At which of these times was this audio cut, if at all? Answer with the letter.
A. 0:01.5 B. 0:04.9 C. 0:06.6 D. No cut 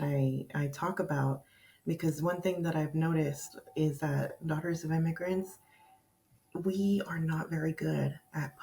D